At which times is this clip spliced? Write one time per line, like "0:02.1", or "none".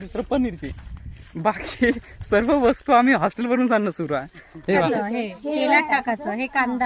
0:04.8